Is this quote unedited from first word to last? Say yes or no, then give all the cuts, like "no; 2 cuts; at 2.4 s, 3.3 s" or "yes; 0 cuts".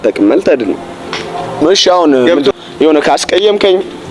no; 1 cut; at 2.5 s